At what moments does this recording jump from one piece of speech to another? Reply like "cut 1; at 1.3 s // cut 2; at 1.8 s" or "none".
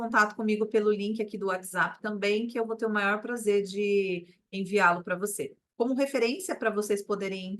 cut 1; at 5.6 s